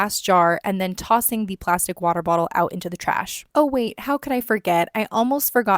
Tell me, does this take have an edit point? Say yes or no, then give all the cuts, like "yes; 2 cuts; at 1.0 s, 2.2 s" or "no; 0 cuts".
yes; 1 cut; at 3.4 s